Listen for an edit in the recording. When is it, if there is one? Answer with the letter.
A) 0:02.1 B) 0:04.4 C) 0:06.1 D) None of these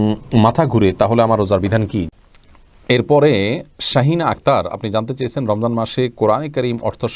A